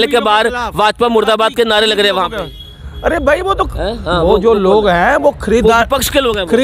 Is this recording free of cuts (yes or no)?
yes